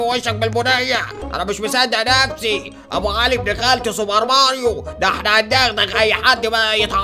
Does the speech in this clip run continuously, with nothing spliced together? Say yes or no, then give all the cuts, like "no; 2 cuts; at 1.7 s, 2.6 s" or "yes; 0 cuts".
no; 1 cut; at 1.2 s